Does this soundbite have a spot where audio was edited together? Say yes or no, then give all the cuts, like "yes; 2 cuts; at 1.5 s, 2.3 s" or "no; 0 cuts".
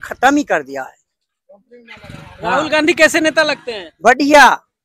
no; 0 cuts